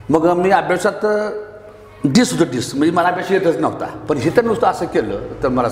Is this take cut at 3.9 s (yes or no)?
yes